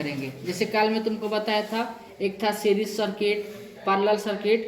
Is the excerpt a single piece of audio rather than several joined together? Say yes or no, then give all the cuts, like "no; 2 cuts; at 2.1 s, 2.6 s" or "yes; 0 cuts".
yes; 0 cuts